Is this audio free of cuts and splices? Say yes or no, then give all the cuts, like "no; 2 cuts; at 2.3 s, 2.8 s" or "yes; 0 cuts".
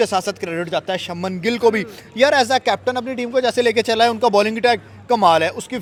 yes; 0 cuts